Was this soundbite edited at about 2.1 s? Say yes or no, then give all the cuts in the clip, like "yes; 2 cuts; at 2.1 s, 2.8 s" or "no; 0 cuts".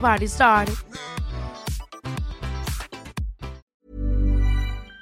no; 1 cut; at 3.6 s